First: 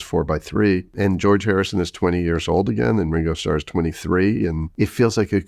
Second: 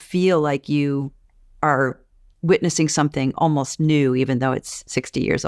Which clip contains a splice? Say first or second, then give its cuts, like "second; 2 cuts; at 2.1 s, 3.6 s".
first; 2 cuts; at 0.9 s, 4.6 s